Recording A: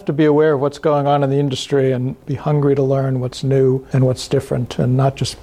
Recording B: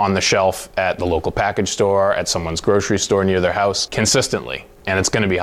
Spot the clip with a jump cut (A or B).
A